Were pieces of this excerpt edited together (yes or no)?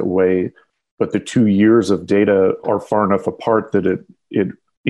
yes